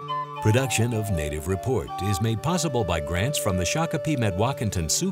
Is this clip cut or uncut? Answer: uncut